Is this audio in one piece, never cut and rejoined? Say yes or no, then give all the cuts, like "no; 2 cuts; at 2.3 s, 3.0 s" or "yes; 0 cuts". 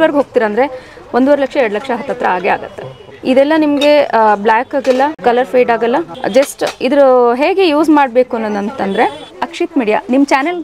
no; 4 cuts; at 3.1 s, 5.2 s, 6.2 s, 9.3 s